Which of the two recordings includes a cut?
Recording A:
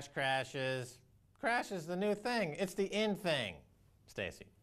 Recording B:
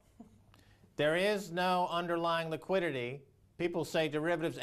A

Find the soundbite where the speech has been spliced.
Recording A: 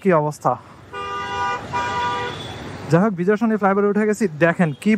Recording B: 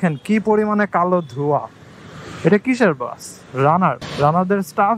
B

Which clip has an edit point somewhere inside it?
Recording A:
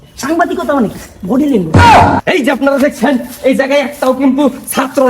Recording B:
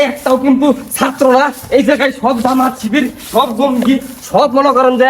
A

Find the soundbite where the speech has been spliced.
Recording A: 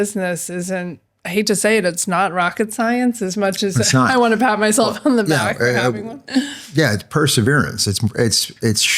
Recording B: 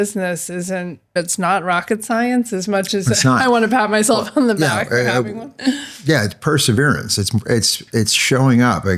B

